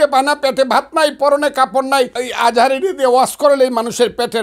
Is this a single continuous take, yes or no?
no